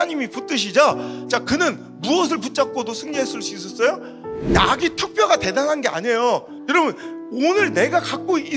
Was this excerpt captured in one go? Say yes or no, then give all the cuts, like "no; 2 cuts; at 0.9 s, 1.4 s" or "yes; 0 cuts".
no; 1 cut; at 6.5 s